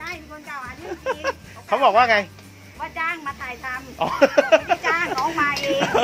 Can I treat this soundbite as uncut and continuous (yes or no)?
yes